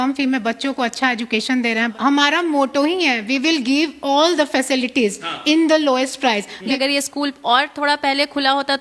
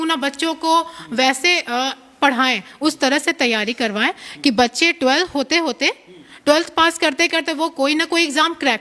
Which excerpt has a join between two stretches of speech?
first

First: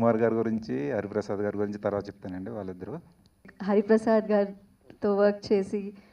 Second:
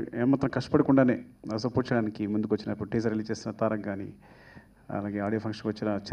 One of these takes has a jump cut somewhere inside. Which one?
first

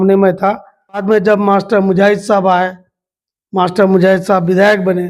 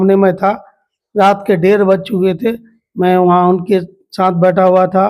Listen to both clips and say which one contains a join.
first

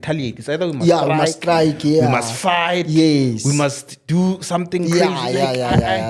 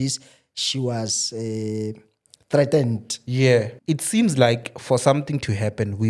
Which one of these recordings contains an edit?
second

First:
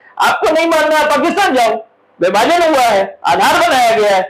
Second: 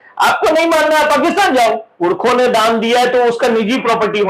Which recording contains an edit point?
second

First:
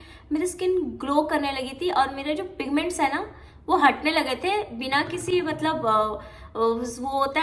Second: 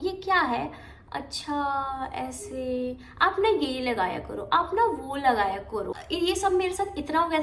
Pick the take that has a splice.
second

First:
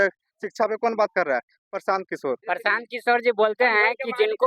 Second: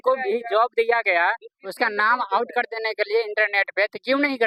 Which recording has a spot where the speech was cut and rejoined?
first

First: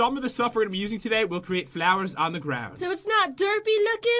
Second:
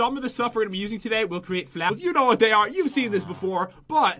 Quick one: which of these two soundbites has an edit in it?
first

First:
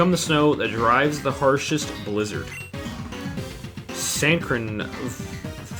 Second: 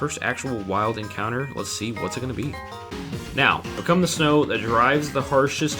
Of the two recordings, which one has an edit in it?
second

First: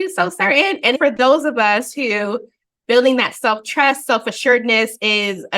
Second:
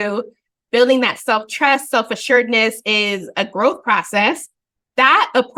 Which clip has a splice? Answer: first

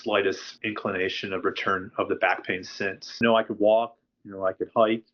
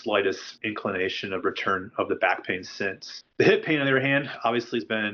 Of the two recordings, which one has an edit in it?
first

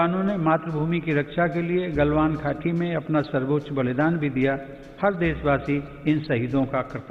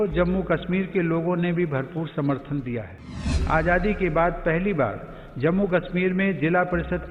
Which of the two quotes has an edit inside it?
second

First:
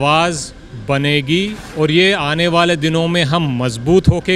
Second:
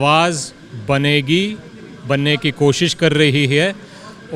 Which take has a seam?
first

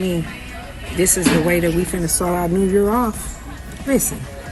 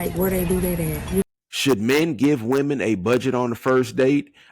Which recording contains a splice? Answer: second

